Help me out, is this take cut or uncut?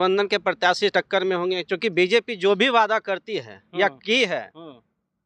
uncut